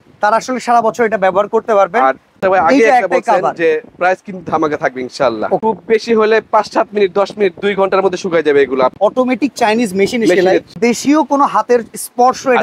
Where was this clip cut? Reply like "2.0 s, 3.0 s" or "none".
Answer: 2.3 s, 5.6 s, 9.0 s, 10.8 s